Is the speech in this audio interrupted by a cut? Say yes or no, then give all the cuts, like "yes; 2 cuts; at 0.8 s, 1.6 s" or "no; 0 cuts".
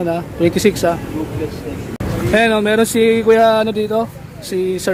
no; 0 cuts